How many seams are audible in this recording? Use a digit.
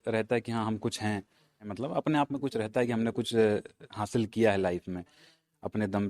1